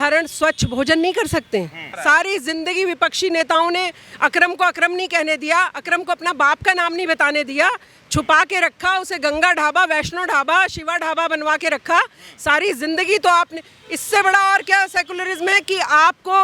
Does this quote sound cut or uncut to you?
cut